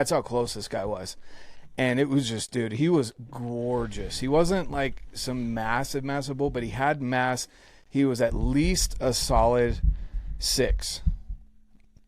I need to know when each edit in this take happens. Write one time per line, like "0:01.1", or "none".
none